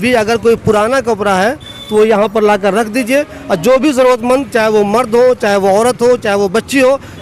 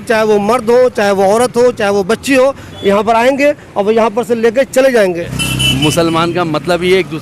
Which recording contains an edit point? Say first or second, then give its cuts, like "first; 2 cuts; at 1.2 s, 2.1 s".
second; 1 cut; at 5.3 s